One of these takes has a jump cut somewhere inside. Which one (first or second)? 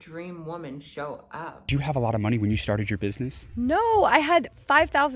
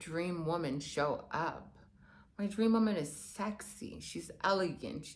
first